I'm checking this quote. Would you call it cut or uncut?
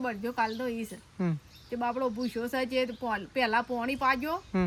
uncut